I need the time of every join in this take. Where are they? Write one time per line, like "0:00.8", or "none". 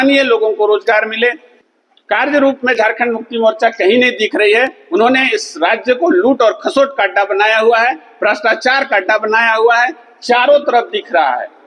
0:01.5

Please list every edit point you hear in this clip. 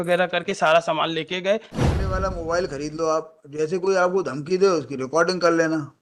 0:01.7

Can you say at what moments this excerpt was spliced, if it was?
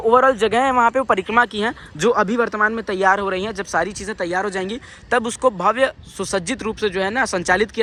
none

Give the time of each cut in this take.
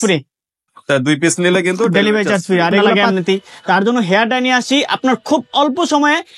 0:03.0

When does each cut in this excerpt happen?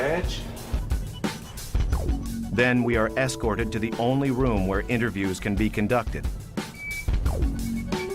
0:05.5

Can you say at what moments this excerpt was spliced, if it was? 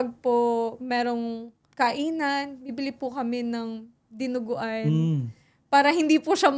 0:01.7

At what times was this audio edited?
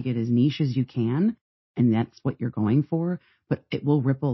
none

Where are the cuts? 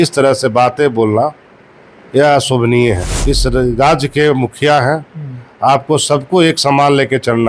0:03.1

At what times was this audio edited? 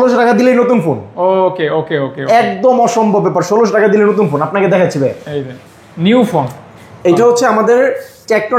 none

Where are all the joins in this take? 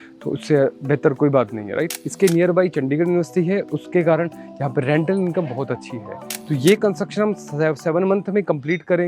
0:06.3

